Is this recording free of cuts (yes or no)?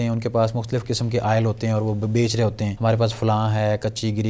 no